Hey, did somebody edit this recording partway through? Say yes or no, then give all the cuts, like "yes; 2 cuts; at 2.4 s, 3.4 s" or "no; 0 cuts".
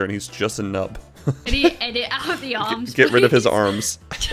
yes; 1 cut; at 1.4 s